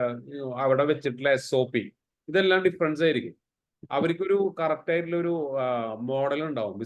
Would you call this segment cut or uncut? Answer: uncut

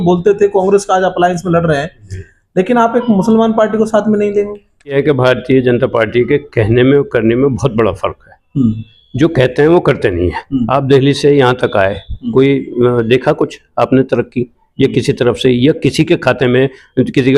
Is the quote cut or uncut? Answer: cut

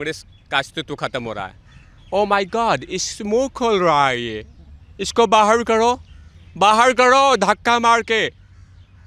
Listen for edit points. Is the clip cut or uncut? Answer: uncut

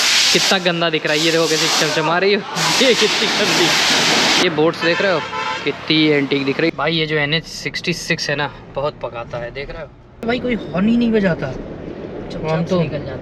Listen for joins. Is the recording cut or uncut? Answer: cut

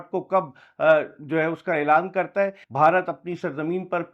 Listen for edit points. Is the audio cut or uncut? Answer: cut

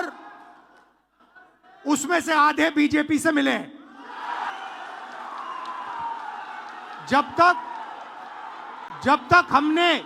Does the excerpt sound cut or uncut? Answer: cut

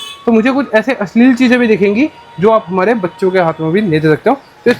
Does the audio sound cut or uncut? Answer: uncut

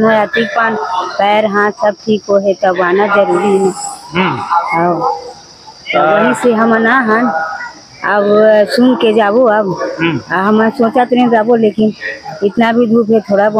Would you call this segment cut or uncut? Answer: uncut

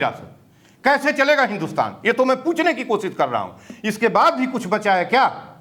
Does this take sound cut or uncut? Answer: uncut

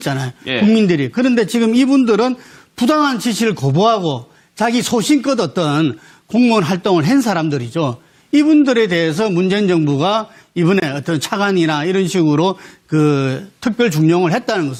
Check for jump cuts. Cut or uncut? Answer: uncut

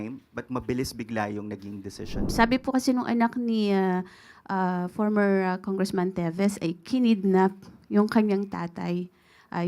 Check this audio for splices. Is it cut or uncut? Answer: cut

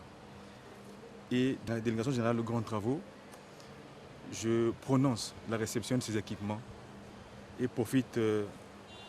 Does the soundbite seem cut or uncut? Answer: cut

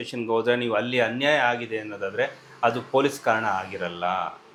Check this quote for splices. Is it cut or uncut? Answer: uncut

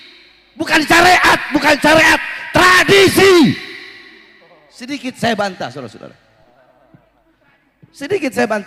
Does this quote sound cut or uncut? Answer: uncut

